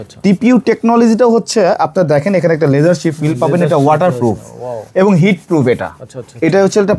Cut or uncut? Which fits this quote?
uncut